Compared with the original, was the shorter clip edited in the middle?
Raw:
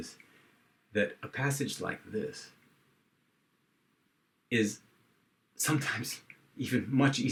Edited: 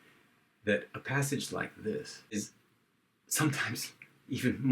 yes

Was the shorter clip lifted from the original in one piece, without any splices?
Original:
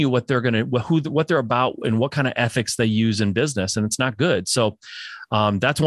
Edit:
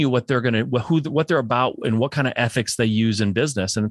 yes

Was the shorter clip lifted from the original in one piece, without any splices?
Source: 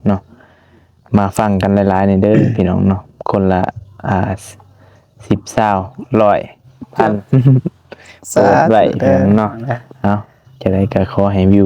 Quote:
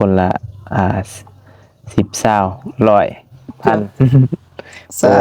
yes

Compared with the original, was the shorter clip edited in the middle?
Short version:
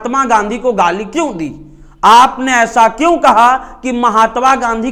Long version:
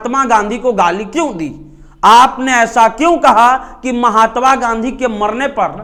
no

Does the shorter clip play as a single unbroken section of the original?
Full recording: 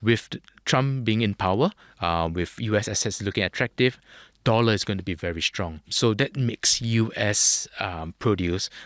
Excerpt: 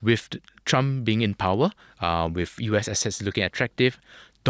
yes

